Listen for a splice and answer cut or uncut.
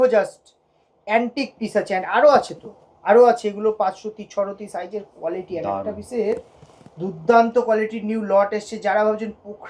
uncut